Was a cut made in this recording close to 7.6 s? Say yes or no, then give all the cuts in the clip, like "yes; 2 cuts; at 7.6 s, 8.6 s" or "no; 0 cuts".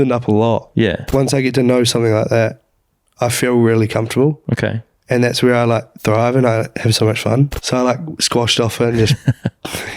yes; 2 cuts; at 1.0 s, 7.6 s